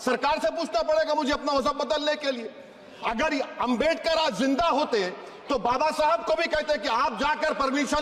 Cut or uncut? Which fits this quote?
uncut